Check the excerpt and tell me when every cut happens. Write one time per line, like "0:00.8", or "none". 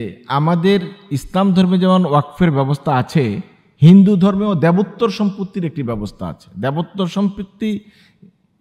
none